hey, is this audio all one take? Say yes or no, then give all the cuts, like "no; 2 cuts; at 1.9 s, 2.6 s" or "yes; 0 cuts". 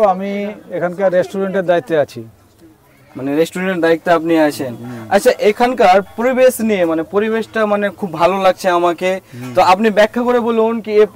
yes; 0 cuts